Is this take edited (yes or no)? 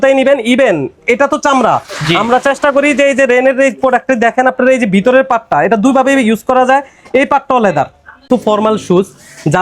yes